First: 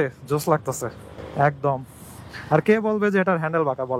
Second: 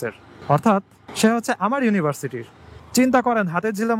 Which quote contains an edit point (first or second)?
second